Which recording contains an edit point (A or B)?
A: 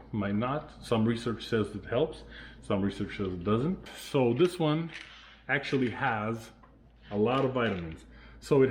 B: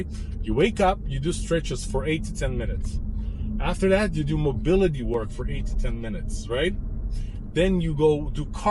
A